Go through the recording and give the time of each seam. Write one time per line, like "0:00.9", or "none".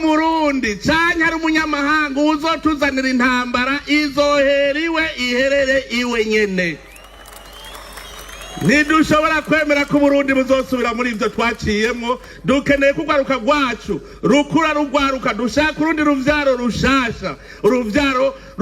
none